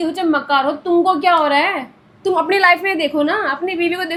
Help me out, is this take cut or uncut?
uncut